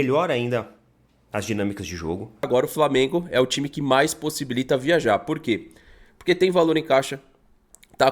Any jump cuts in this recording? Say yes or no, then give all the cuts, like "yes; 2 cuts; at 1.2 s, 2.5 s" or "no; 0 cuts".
yes; 1 cut; at 2.5 s